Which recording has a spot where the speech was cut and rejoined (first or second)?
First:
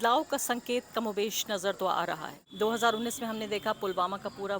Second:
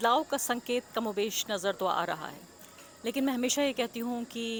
first